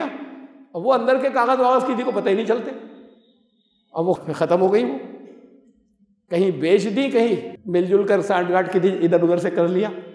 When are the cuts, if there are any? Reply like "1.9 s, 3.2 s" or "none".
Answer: none